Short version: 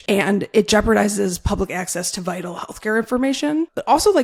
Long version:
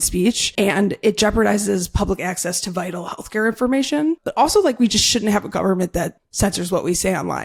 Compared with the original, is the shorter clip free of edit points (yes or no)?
yes